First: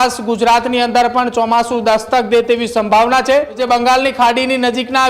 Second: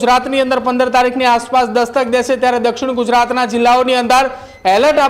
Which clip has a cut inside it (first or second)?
first